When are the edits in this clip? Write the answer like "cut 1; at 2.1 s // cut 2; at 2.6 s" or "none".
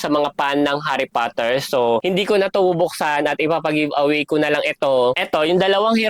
cut 1; at 2.0 s // cut 2; at 5.2 s